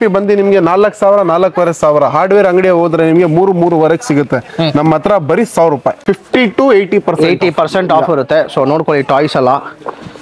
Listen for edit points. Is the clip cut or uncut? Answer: cut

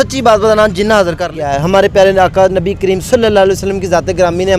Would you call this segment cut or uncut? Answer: cut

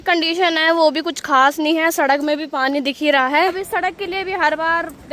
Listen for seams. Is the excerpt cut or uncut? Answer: cut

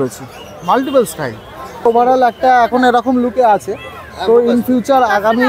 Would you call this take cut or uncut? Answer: cut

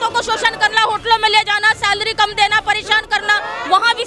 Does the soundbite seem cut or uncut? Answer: uncut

